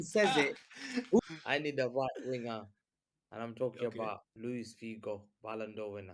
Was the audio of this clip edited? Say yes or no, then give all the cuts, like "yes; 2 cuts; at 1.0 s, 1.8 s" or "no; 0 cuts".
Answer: yes; 2 cuts; at 1.2 s, 4.3 s